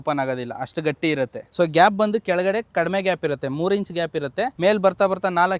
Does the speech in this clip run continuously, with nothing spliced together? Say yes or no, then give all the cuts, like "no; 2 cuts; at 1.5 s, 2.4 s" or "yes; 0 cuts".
no; 2 cuts; at 1.4 s, 4.5 s